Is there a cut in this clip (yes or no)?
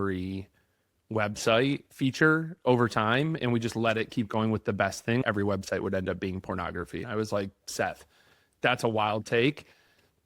yes